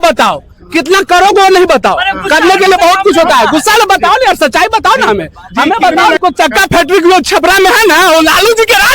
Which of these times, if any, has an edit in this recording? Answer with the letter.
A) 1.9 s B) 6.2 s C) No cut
B